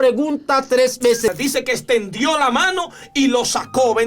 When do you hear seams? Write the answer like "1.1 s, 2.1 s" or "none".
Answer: 1.3 s